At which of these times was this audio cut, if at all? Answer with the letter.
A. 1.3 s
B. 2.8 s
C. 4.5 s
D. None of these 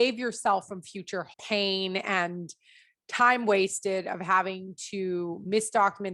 A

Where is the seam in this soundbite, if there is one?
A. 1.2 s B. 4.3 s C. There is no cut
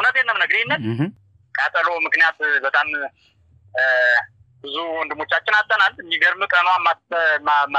A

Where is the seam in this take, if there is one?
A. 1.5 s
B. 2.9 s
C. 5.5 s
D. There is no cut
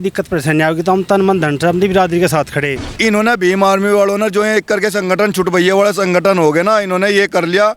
B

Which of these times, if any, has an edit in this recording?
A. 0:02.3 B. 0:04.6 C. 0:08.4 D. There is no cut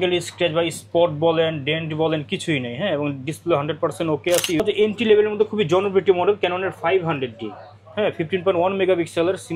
B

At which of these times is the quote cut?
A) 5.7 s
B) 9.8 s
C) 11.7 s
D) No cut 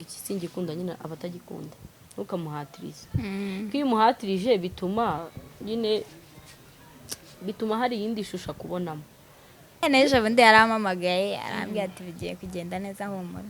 B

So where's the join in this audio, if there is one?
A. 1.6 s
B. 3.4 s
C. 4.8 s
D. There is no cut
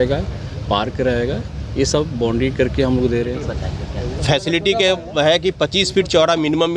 B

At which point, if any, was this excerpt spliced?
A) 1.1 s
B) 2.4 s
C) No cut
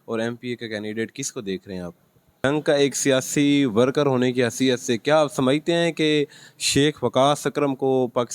B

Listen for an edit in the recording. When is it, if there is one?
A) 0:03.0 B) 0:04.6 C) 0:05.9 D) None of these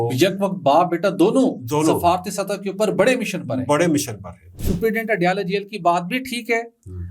B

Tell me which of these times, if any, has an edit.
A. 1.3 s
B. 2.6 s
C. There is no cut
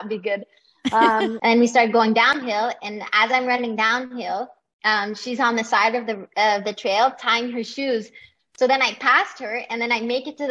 A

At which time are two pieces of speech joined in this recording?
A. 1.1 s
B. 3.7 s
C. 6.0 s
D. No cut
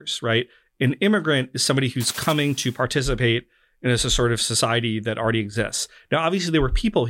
D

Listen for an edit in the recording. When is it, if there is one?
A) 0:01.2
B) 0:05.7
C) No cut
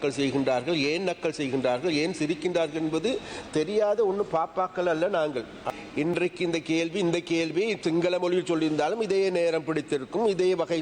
B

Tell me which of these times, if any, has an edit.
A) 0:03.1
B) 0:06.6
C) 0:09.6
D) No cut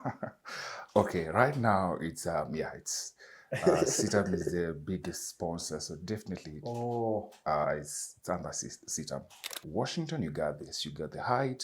C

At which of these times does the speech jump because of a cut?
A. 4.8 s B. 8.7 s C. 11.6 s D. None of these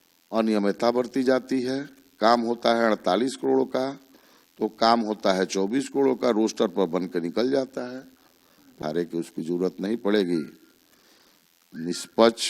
B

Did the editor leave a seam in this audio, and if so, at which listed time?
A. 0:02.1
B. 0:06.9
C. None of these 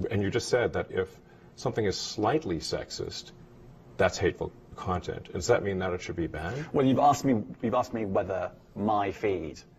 C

